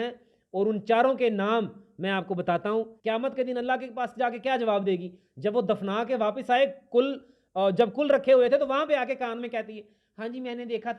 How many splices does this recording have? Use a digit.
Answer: 1